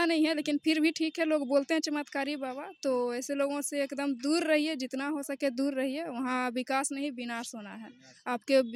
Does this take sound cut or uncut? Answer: uncut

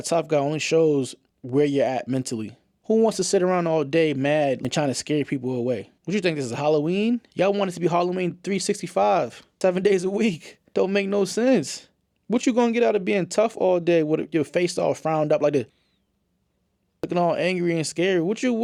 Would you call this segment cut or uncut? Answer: uncut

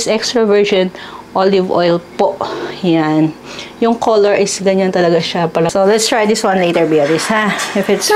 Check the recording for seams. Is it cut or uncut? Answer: cut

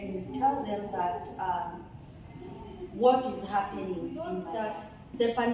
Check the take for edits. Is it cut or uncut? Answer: cut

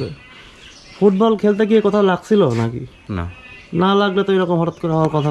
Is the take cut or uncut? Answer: uncut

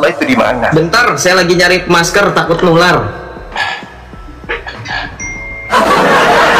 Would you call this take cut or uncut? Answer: uncut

